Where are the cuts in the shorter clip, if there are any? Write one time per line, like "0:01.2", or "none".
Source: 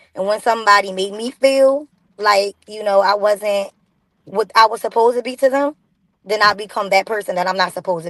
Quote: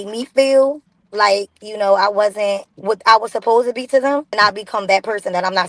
0:02.7
0:04.3